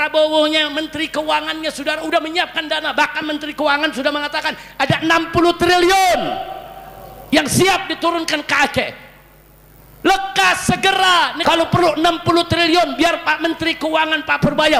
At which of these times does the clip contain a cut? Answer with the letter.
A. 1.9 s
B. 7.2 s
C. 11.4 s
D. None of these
C